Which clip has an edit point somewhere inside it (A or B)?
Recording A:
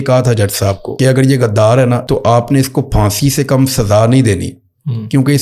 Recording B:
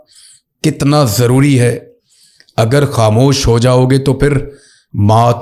A